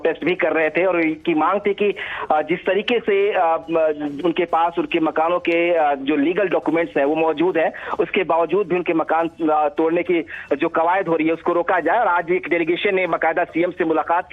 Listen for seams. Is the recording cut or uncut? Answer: uncut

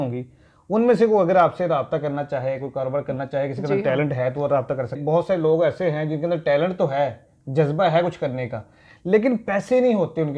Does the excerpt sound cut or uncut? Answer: cut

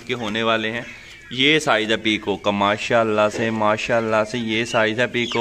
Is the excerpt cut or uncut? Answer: uncut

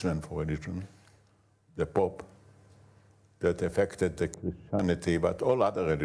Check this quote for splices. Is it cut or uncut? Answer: uncut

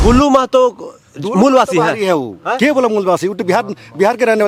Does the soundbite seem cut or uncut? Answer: uncut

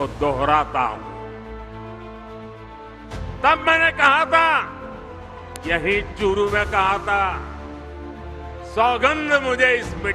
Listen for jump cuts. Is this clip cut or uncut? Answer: uncut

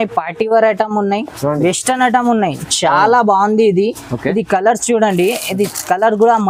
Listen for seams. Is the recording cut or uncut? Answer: uncut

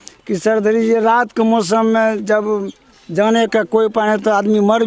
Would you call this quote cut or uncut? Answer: uncut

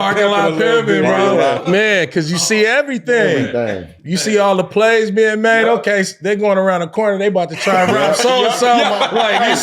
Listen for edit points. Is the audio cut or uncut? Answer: cut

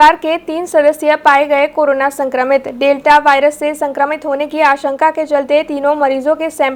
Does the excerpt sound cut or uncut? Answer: uncut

